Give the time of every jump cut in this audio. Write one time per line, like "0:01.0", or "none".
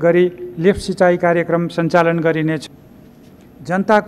0:02.6